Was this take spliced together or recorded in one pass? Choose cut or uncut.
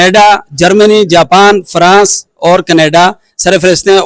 uncut